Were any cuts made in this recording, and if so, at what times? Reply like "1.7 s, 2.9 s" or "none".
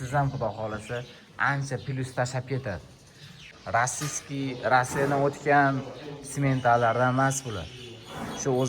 3.6 s